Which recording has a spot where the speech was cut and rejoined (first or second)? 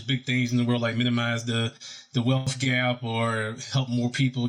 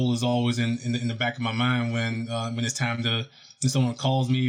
first